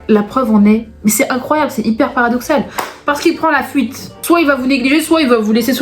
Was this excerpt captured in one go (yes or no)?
no